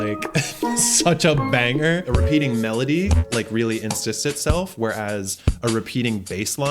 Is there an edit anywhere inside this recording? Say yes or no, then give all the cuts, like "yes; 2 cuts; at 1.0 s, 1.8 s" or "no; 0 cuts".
yes; 1 cut; at 2.0 s